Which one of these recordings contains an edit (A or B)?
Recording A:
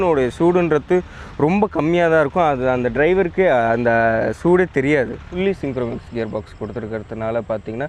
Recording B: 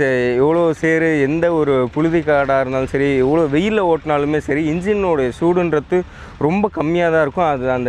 A